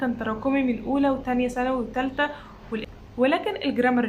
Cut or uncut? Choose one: cut